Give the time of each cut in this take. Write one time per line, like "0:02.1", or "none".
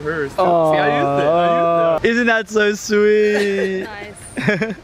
0:02.0